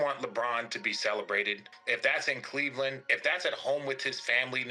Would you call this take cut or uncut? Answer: cut